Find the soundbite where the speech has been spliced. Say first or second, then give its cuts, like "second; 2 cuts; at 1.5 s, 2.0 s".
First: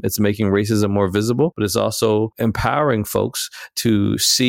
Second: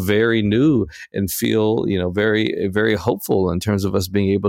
first; 2 cuts; at 1.5 s, 2.3 s